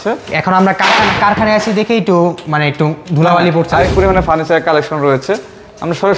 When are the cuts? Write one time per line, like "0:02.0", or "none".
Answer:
0:03.9

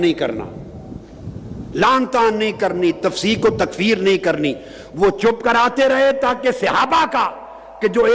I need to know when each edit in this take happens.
none

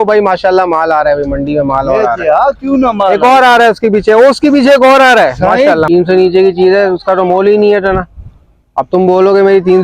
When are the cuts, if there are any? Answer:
0:05.8

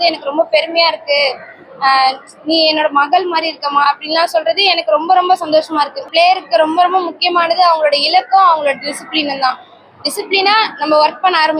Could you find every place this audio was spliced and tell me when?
0:06.1

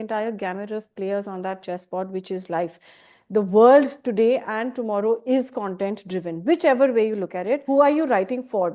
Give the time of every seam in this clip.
0:07.6

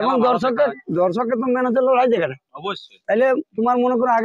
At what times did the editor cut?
none

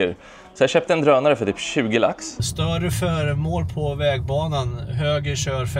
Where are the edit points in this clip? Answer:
0:02.3

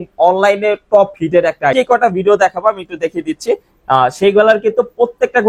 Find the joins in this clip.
0:01.7

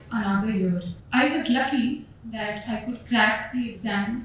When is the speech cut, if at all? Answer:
0:00.9

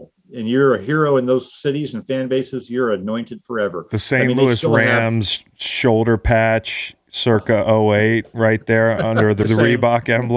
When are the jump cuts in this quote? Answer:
0:09.5

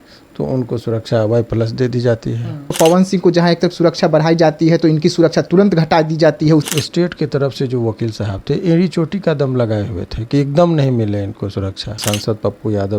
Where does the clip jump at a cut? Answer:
0:02.7
0:06.7
0:12.0

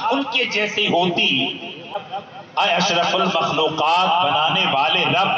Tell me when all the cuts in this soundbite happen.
0:02.1

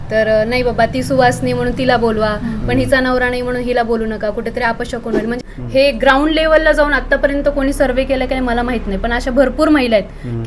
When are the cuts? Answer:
0:05.5

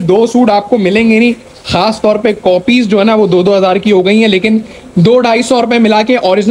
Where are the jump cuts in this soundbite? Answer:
none

